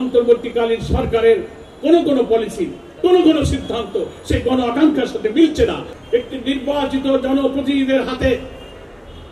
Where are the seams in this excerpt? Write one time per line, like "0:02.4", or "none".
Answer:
0:05.9